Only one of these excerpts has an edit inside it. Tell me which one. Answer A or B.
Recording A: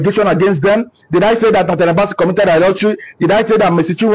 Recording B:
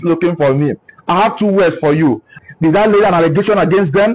B